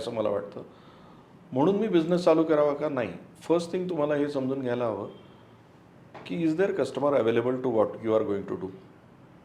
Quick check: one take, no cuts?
yes; 0 cuts

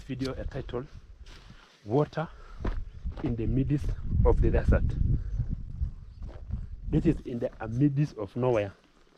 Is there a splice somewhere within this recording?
yes; 1 cut; at 5.7 s

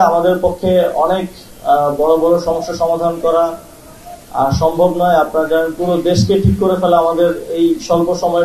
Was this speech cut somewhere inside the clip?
no; 0 cuts

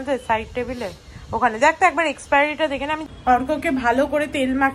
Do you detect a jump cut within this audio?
yes; 1 cut; at 3.1 s

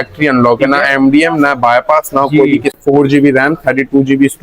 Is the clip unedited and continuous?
no; 1 cut; at 2.8 s

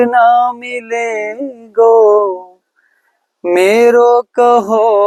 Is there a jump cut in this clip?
no; 0 cuts

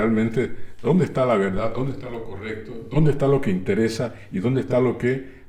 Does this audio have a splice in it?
no; 0 cuts

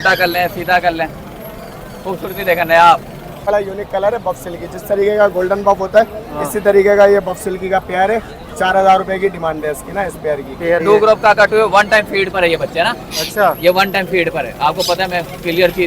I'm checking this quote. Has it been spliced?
yes; 2 cuts; at 3.5 s, 10.8 s

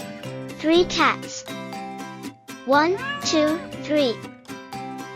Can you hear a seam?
yes; 2 cuts; at 1.2 s, 2.6 s

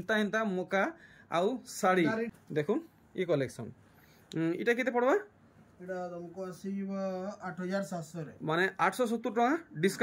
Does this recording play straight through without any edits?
no; 1 cut; at 2.3 s

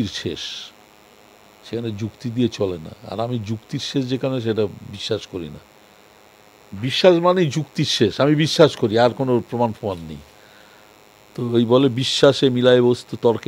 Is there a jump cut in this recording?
no; 0 cuts

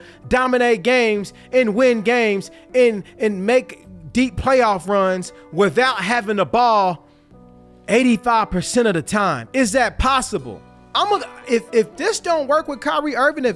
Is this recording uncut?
yes; 0 cuts

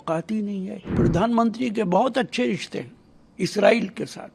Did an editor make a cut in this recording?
yes; 1 cut; at 0.9 s

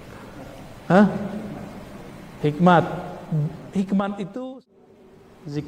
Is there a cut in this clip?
yes; 1 cut; at 4.7 s

